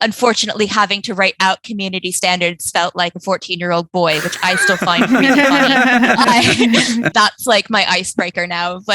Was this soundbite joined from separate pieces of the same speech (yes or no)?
yes